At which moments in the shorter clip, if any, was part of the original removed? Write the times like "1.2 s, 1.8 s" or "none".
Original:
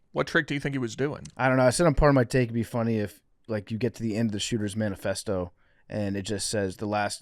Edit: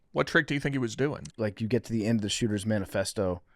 1.2 s